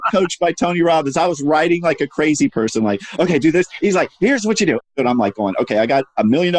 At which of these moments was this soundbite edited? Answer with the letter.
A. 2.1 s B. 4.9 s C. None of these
B